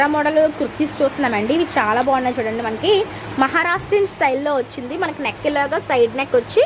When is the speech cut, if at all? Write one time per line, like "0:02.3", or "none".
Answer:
none